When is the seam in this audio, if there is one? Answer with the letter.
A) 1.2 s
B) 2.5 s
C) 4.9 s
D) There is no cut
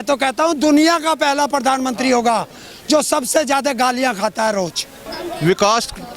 C